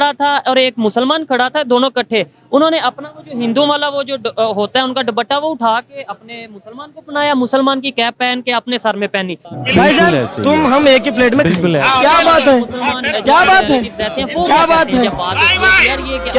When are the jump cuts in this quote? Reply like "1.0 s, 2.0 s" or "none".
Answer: 9.4 s